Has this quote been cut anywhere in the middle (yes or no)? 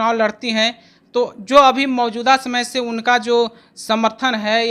no